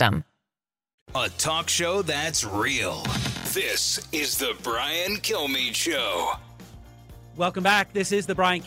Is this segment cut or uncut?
uncut